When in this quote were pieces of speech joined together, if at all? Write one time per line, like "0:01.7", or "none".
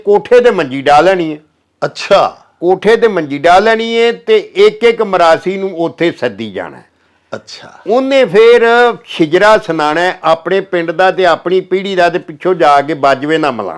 none